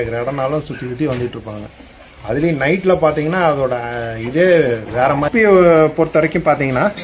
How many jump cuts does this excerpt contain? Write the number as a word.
one